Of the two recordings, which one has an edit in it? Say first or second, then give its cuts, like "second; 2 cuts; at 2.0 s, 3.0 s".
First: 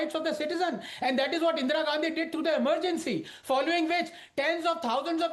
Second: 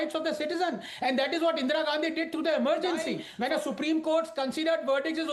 second; 1 cut; at 3.2 s